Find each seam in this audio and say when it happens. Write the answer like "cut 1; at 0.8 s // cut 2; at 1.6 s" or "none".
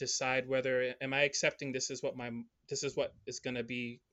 none